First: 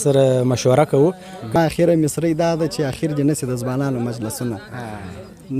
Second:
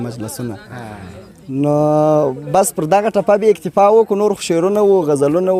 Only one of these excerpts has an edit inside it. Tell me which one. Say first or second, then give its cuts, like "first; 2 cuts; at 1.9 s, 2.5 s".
first; 1 cut; at 1.5 s